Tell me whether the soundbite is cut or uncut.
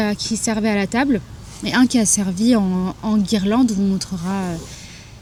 uncut